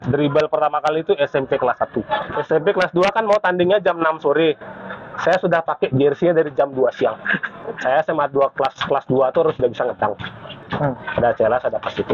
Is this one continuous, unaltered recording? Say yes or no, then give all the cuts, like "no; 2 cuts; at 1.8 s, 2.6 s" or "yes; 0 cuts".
no; 3 cuts; at 2.3 s, 7.8 s, 10.7 s